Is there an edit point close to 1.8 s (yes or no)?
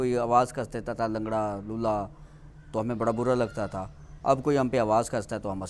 no